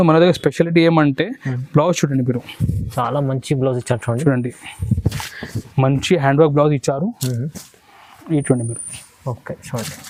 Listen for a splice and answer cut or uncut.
uncut